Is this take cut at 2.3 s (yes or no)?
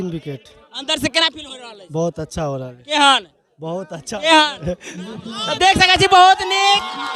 no